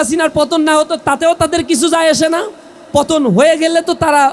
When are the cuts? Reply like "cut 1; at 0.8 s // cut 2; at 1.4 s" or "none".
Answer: none